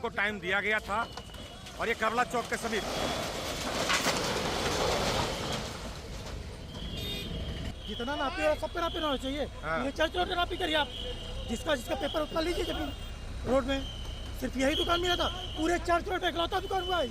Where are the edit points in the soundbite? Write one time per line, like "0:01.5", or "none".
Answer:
0:07.7